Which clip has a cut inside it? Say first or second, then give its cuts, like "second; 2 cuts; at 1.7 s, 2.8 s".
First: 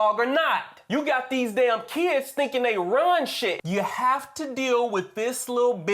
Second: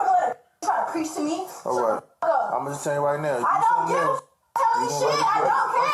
first; 1 cut; at 3.6 s